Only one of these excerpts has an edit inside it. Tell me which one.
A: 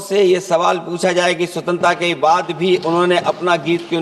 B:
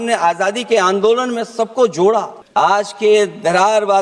B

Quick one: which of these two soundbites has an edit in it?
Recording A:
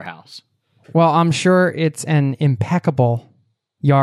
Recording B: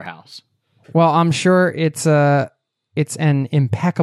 A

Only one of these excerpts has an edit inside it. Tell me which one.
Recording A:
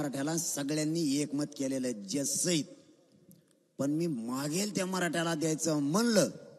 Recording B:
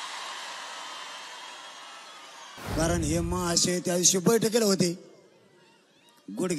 B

